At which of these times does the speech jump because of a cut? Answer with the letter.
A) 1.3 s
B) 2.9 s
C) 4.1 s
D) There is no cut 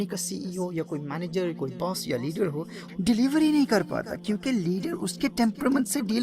B